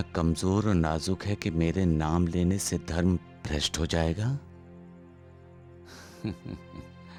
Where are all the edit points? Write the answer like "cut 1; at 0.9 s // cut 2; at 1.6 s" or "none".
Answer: none